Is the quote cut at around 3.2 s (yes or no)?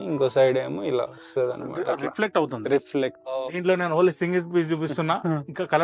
yes